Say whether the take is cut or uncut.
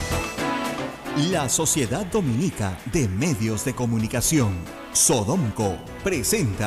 cut